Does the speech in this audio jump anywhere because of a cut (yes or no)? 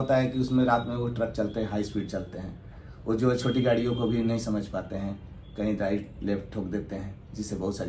no